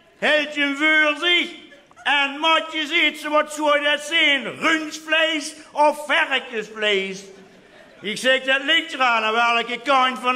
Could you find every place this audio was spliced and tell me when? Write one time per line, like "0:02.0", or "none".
0:03.4